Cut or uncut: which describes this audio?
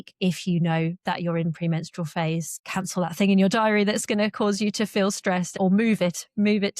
cut